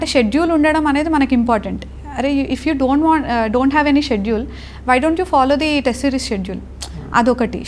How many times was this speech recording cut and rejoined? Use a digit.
0